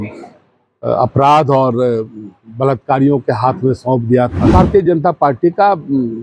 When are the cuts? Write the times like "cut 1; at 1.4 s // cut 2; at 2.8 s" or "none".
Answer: cut 1; at 4.4 s